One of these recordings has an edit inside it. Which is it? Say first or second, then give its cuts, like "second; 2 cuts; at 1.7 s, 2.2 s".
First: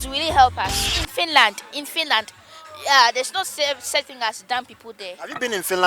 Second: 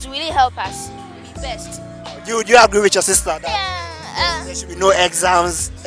first; 1 cut; at 0.9 s